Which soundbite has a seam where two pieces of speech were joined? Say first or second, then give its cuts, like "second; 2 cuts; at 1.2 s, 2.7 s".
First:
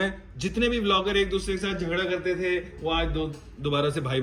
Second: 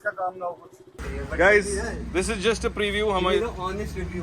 second; 1 cut; at 1.0 s